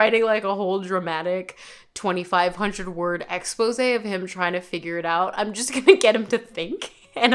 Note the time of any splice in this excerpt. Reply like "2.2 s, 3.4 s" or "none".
none